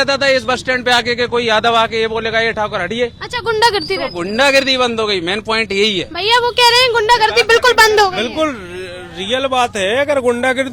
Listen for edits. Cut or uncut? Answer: uncut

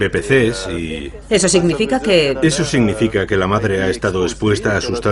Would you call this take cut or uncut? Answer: cut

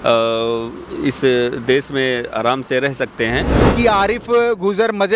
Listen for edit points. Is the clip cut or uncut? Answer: cut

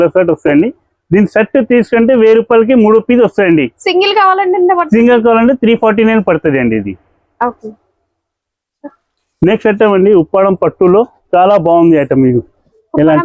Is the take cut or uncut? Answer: uncut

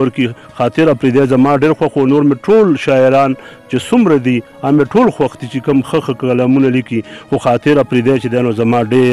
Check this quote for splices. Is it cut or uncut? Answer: uncut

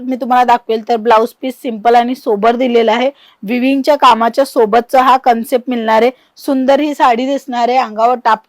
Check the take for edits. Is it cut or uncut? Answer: uncut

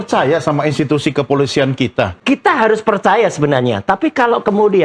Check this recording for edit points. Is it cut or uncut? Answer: cut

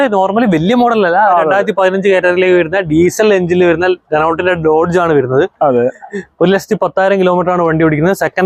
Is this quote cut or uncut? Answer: uncut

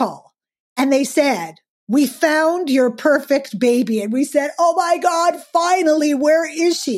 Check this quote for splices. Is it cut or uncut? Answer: uncut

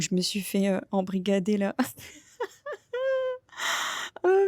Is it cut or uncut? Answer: uncut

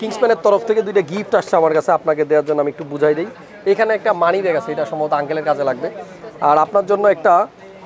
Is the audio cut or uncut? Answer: uncut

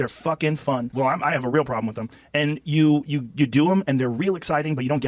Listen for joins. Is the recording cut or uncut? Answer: uncut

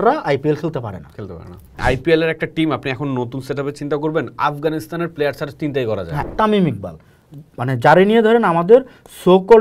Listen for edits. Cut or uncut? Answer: cut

